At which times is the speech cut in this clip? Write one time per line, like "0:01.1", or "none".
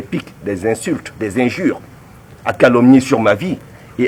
none